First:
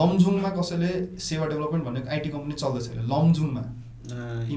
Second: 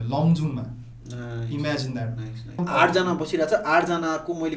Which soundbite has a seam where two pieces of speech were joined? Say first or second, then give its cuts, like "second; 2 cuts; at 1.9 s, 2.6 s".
second; 1 cut; at 2.6 s